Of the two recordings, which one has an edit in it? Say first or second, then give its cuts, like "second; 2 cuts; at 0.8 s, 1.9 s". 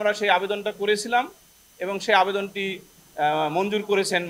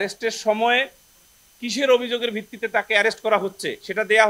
second; 1 cut; at 1.2 s